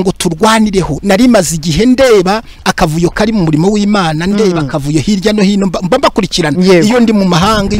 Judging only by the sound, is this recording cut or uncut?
cut